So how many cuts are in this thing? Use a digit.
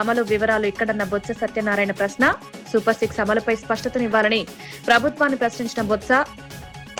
0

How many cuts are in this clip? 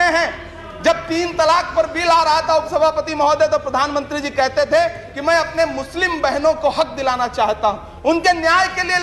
0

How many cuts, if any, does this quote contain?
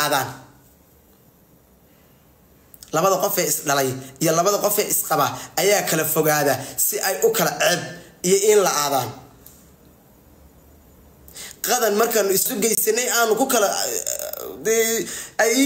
1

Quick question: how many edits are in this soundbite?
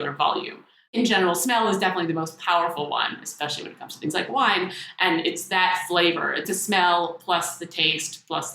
2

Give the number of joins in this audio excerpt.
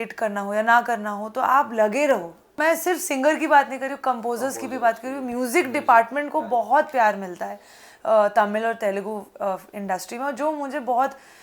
1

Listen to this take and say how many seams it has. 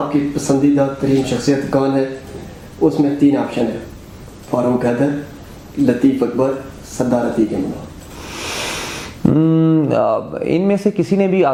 0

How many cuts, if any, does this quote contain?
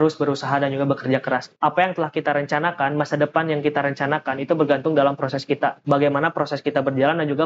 2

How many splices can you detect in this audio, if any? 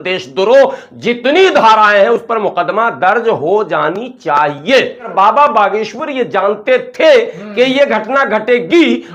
1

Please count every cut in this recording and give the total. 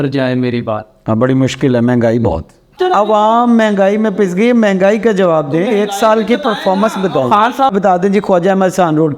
2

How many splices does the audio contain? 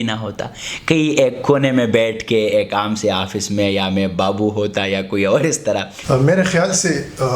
1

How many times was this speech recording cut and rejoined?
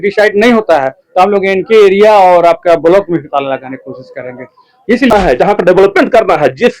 1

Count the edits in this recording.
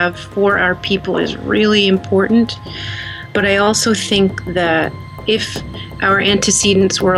1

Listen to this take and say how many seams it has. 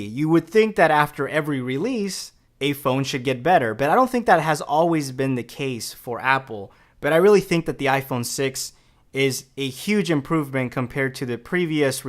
1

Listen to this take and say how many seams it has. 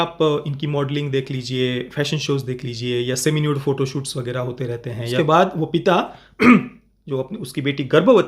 1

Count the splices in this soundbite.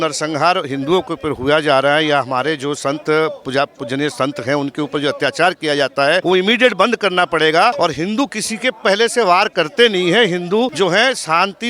3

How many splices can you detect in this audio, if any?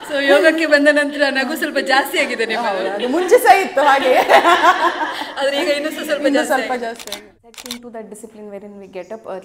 1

